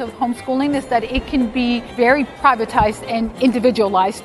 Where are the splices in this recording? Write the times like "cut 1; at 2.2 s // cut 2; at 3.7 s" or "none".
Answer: cut 1; at 2.1 s